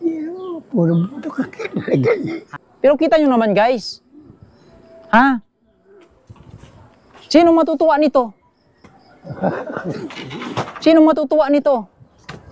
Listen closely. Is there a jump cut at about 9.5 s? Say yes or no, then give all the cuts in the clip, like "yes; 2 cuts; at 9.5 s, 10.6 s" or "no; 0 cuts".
no; 1 cut; at 2.4 s